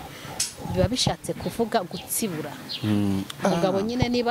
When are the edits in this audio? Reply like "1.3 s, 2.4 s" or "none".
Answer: none